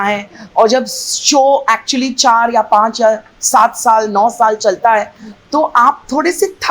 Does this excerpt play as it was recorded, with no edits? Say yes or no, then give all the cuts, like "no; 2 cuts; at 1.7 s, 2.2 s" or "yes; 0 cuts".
yes; 0 cuts